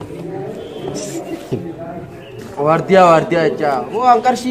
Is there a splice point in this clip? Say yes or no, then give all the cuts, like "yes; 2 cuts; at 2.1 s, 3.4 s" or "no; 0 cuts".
no; 0 cuts